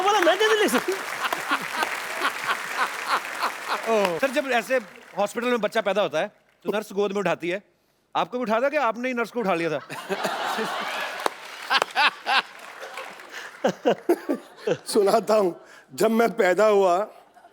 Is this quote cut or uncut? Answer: cut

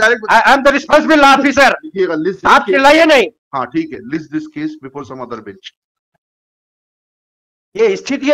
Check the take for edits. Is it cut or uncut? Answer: uncut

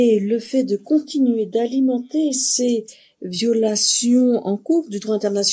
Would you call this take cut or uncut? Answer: uncut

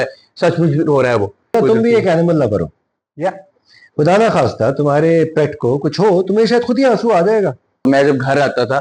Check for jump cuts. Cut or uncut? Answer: cut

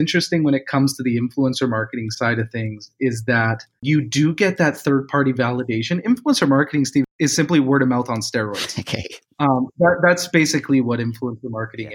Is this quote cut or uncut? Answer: cut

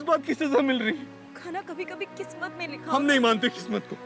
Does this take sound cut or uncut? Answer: cut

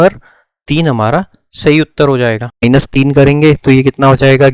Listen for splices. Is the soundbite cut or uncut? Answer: cut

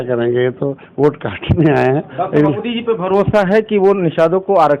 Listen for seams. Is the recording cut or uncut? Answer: cut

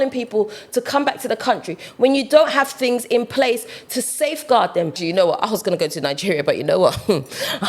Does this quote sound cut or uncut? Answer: cut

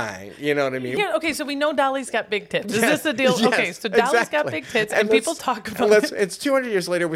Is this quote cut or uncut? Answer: cut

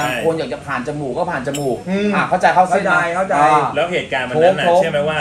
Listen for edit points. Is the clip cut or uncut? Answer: uncut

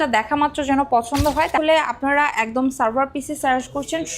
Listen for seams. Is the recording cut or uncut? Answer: cut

